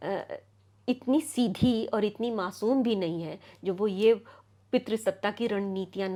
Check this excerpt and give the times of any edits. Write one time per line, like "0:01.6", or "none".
none

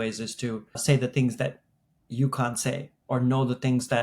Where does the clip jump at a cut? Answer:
0:00.8
0:02.9

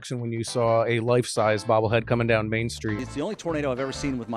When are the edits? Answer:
0:03.0

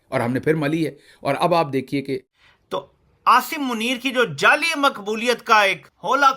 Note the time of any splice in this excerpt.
0:02.3

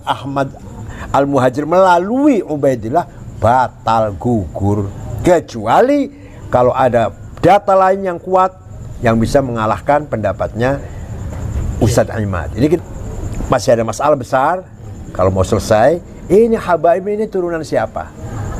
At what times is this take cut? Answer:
0:12.8

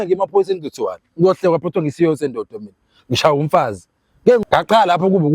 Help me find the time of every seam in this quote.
0:04.4

